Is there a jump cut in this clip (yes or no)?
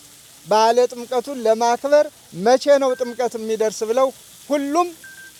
no